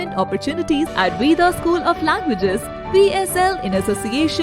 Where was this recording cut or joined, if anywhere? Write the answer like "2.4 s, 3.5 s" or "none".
0.9 s